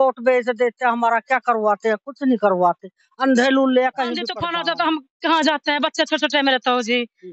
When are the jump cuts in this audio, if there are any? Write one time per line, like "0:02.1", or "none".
0:04.4